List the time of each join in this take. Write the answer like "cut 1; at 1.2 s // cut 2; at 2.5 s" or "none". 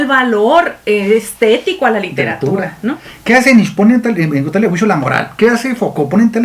cut 1; at 3.1 s